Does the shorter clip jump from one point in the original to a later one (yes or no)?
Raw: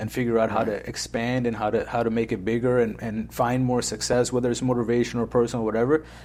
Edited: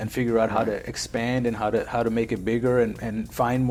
no